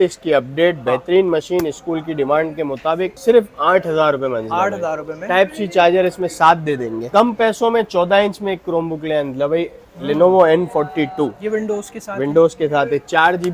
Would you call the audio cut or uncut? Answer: uncut